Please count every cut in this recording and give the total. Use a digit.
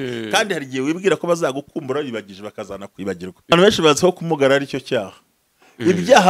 1